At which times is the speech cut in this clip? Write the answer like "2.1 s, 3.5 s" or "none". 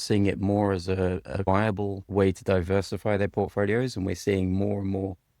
1.6 s